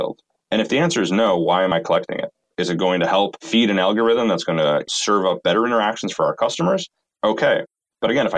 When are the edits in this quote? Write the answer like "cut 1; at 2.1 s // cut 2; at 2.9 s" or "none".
cut 1; at 3.4 s